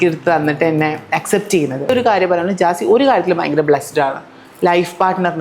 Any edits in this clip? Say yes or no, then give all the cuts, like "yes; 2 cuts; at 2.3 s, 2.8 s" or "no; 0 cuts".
yes; 1 cut; at 1.9 s